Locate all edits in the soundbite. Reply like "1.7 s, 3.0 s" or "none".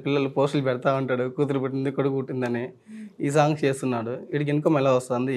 none